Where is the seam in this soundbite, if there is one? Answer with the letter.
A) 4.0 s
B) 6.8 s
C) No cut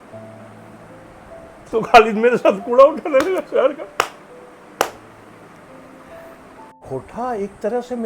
B